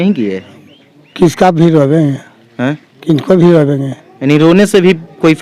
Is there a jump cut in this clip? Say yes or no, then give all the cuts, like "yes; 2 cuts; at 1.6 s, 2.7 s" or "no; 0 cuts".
no; 0 cuts